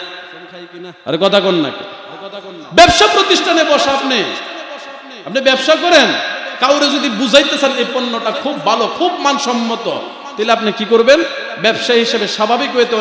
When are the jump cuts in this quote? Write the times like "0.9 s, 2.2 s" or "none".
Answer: none